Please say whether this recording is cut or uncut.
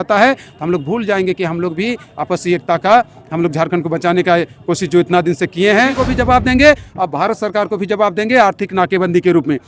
cut